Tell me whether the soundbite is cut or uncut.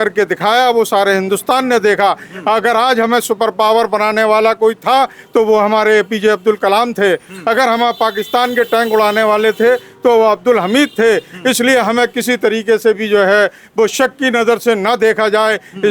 uncut